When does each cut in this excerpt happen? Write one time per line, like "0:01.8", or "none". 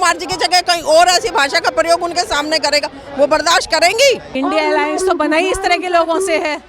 0:04.3